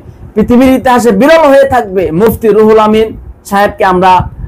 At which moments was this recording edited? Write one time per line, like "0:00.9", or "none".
0:02.3